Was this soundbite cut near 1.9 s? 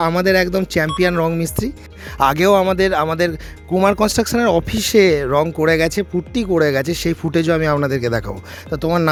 no; 0 cuts

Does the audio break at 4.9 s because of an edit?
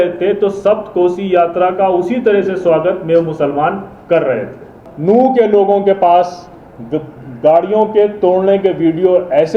yes; 1 cut; at 4.9 s

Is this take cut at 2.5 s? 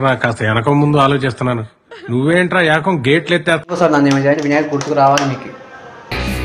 no; 1 cut; at 3.8 s

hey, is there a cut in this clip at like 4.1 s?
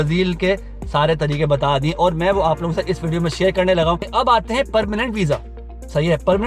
yes; 1 cut; at 4.1 s

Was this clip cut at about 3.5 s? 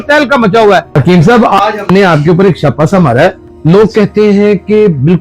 yes; 2 cuts; at 0.9 s, 3.5 s

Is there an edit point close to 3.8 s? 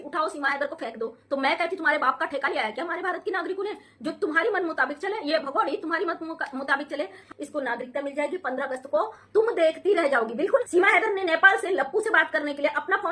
no; 2 cuts; at 7.2 s, 10.6 s

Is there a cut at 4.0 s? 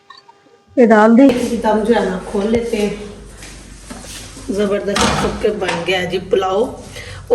no; 1 cut; at 1.3 s

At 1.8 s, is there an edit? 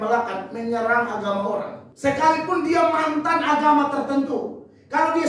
yes; 1 cut; at 1.8 s

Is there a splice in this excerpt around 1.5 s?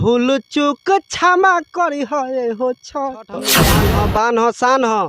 no; 1 cut; at 3.6 s

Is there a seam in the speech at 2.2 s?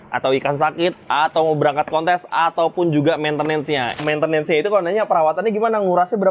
no; 1 cut; at 4.0 s

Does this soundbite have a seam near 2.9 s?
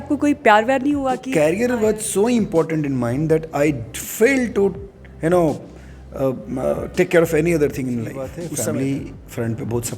no; 2 cuts; at 1.2 s, 8.4 s

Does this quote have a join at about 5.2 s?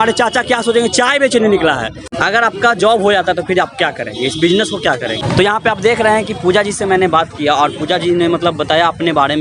yes; 2 cuts; at 2.0 s, 5.2 s

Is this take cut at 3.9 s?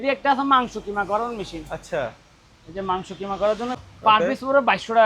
yes; 1 cut; at 3.9 s

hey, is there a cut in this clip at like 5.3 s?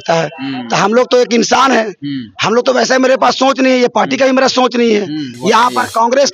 yes; 1 cut; at 5.3 s

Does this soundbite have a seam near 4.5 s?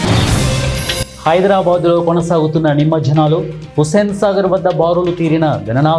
no; 1 cut; at 1.1 s

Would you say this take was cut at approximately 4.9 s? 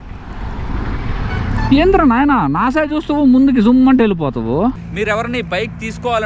yes; 1 cut; at 4.9 s

